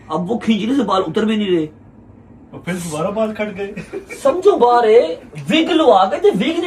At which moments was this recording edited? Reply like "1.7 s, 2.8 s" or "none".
none